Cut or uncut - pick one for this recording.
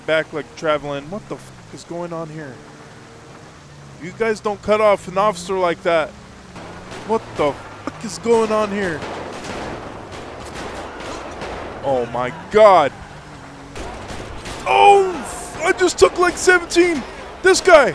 uncut